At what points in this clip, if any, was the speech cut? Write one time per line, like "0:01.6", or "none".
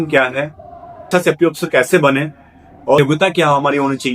0:01.1
0:03.0